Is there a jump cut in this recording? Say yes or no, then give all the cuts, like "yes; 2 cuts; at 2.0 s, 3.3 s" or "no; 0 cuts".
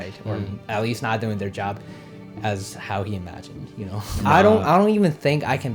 yes; 1 cut; at 4.2 s